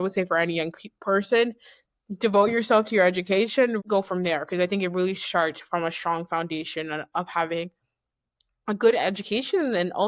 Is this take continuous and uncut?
no; 1 cut; at 3.8 s

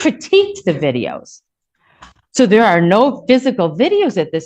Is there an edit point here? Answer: no; 0 cuts

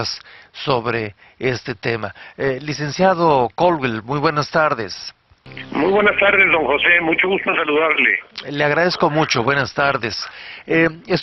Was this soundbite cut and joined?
yes; 1 cut; at 8.2 s

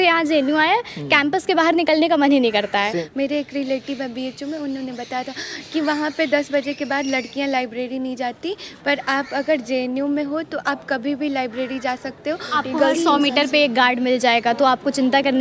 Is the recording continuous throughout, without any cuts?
no; 2 cuts; at 3.0 s, 12.5 s

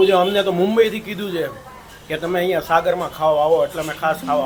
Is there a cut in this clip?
no; 0 cuts

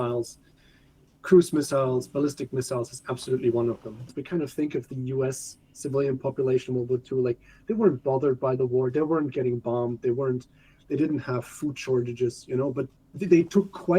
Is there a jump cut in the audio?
yes; 2 cuts; at 4.2 s, 12.9 s

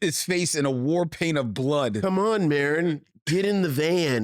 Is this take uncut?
yes; 0 cuts

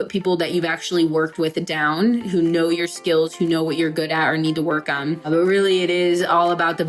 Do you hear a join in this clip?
yes; 1 cut; at 5.3 s

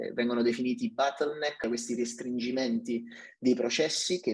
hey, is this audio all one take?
no; 1 cut; at 1.6 s

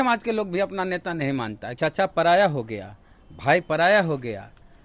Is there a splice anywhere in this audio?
yes; 1 cut; at 1.6 s

